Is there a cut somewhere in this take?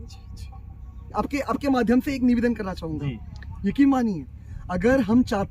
yes; 1 cut; at 1.0 s

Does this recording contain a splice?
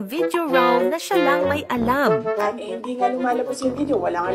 yes; 1 cut; at 2.4 s

